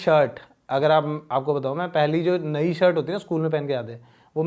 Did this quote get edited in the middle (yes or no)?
no